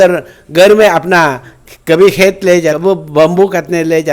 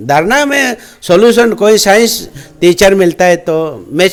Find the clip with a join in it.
first; 1 cut; at 2.8 s

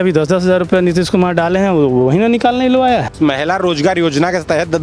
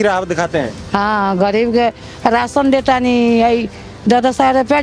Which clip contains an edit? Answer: first; 1 cut; at 3.1 s

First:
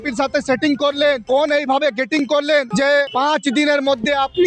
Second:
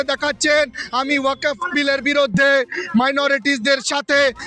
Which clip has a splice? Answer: first; 2 cuts; at 1.2 s, 2.9 s

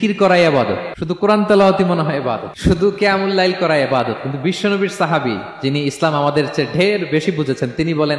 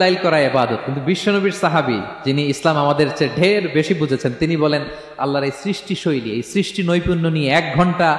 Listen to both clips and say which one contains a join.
first; 2 cuts; at 0.9 s, 2.5 s

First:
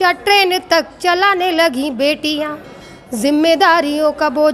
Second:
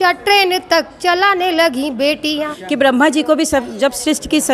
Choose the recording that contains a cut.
second; 1 cut; at 2.5 s

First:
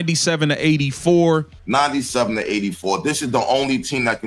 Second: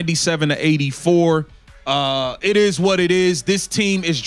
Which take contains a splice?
first; 1 cut; at 1.6 s

